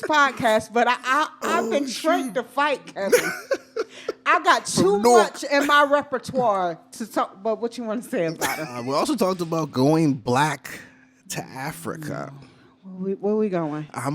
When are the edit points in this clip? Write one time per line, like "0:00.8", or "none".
0:08.7